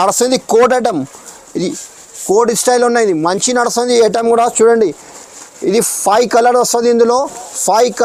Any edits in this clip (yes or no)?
no